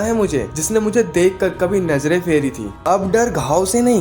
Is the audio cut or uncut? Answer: cut